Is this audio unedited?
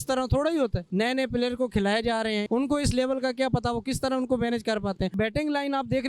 no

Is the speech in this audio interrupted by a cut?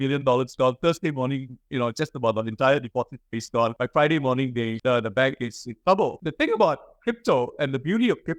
yes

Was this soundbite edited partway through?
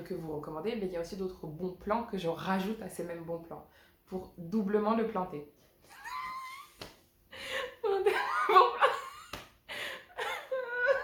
no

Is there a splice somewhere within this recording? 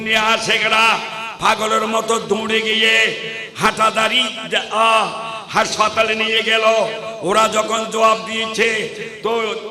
no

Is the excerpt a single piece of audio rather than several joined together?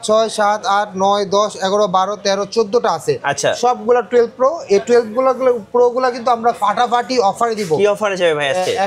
yes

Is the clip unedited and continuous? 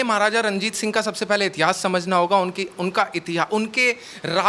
yes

